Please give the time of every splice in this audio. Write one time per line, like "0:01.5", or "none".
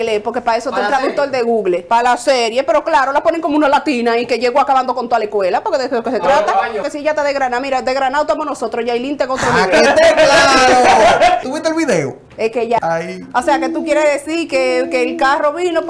0:01.8
0:06.9
0:11.5
0:12.8